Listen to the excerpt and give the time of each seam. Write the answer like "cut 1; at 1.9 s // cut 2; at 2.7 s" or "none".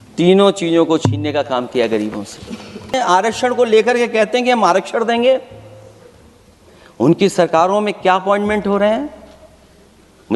cut 1; at 2.9 s